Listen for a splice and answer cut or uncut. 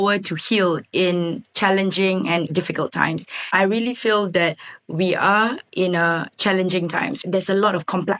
cut